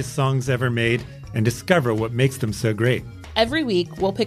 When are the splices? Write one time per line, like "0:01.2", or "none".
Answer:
none